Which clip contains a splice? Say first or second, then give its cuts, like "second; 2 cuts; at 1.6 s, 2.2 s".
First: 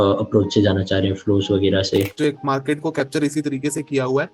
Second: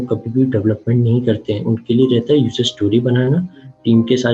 first; 1 cut; at 2.1 s